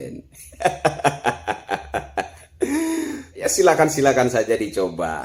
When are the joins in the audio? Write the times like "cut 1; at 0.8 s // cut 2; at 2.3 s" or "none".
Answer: cut 1; at 3.4 s